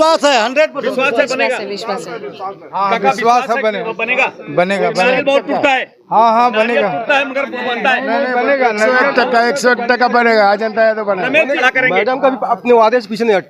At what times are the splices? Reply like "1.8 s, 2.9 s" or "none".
11.6 s

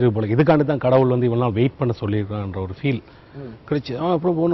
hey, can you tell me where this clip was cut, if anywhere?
none

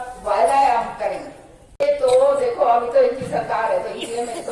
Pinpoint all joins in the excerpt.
1.8 s

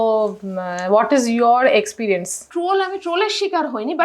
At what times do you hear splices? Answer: 2.4 s

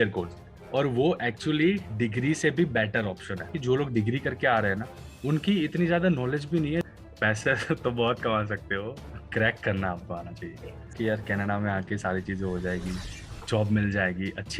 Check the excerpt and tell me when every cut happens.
3.5 s, 6.9 s, 10.9 s

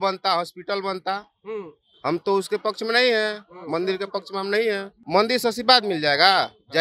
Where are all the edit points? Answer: 4.9 s

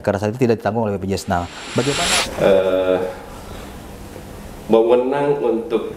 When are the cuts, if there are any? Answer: 2.0 s

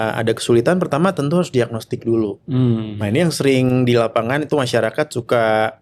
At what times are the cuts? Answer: none

